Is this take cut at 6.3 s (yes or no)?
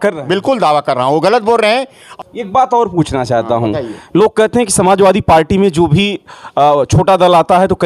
no